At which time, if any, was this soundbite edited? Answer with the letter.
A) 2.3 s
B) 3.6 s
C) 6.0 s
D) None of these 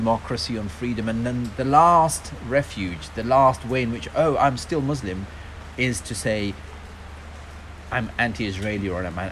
D